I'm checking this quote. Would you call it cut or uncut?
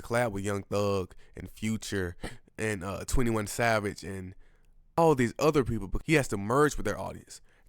cut